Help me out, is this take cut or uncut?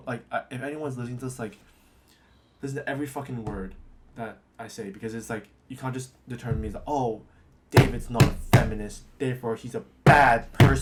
uncut